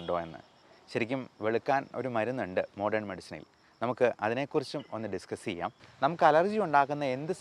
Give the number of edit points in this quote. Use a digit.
1